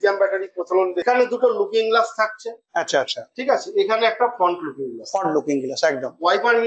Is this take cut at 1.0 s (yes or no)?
yes